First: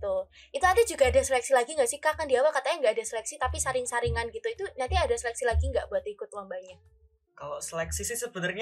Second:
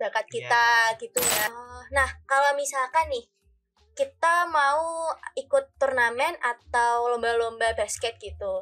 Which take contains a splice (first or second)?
second